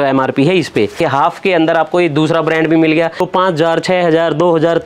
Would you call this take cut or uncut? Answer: cut